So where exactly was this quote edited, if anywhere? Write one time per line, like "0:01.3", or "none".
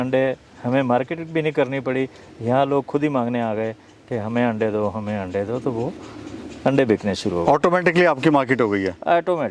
none